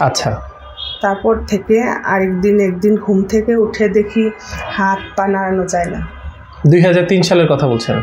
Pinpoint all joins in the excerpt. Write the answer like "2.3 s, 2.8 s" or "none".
none